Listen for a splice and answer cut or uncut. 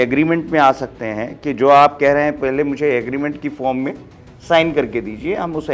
uncut